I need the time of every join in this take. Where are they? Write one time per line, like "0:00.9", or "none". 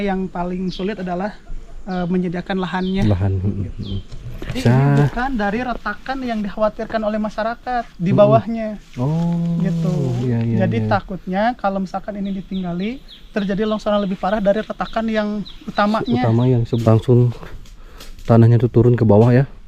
0:04.6
0:16.8